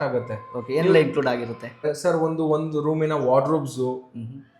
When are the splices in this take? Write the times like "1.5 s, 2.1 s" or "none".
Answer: 1.8 s